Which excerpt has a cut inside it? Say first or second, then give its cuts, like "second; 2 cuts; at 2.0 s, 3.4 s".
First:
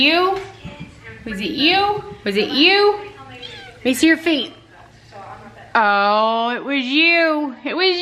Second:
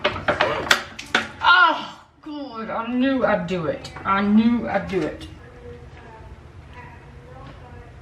second; 1 cut; at 5.4 s